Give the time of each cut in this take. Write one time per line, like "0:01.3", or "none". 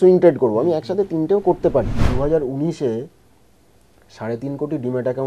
0:02.0